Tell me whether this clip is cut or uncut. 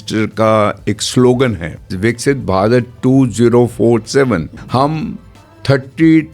cut